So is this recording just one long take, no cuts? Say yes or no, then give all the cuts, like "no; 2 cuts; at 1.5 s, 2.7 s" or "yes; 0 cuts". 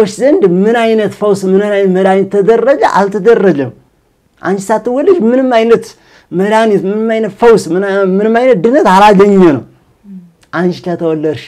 yes; 0 cuts